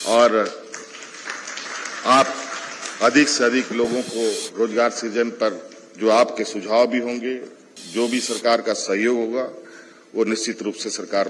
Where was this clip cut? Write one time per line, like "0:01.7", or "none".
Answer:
none